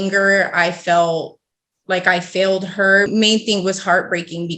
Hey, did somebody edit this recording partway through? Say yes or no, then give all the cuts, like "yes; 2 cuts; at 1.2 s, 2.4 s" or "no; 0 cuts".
yes; 1 cut; at 3.1 s